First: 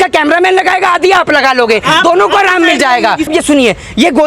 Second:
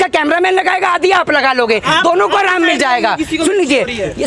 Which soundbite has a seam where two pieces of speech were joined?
first; 1 cut; at 3.3 s

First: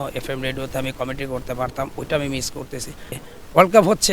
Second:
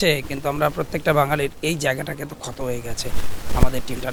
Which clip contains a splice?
first; 1 cut; at 3.1 s

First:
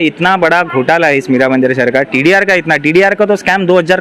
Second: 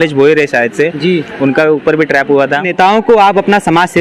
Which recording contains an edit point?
second; 1 cut; at 2.7 s

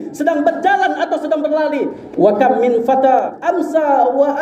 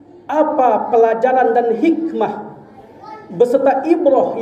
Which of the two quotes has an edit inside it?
first; 2 cuts; at 2.0 s, 3.4 s

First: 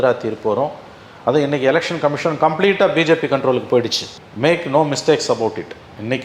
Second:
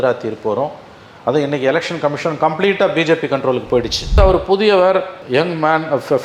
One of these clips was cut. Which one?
second; 1 cut; at 4.2 s

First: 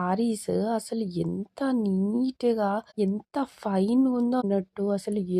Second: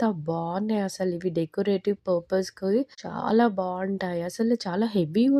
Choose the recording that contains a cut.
first; 1 cut; at 4.4 s

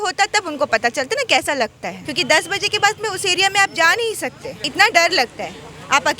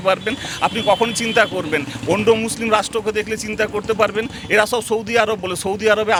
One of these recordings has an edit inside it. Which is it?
first; 2 cuts; at 2.0 s, 4.7 s

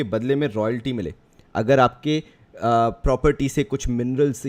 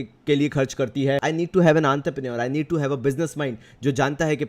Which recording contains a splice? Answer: second; 1 cut; at 1.2 s

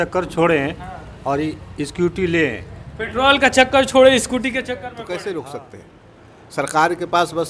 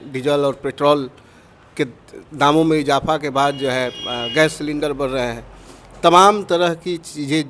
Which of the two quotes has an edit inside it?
first; 1 cut; at 4.9 s

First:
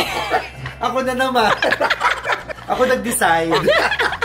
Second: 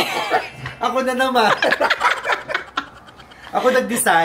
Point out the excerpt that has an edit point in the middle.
first; 1 cut; at 2.5 s

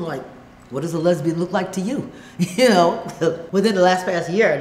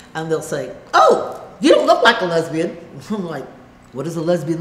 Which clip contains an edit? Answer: first; 1 cut; at 3.4 s

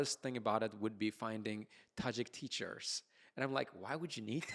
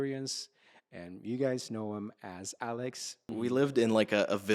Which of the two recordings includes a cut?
second; 1 cut; at 3.3 s

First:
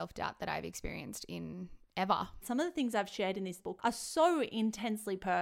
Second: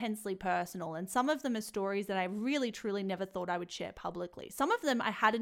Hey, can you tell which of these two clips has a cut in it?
first; 2 cuts; at 2.4 s, 3.6 s

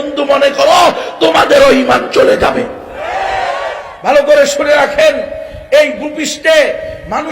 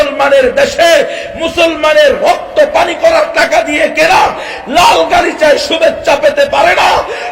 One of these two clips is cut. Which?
first; 1 cut; at 3.8 s

